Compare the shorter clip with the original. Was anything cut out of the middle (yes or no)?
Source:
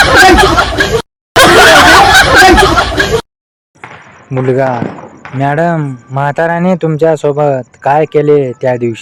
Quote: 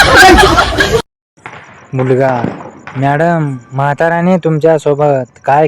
yes